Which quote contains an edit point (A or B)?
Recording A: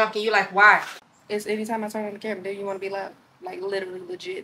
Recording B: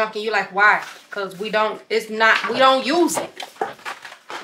A